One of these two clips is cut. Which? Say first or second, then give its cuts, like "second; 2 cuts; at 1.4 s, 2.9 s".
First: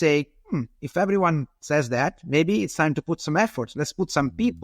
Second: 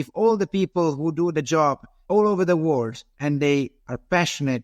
second; 2 cuts; at 1.9 s, 3.5 s